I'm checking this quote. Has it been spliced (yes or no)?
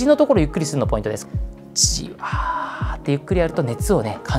yes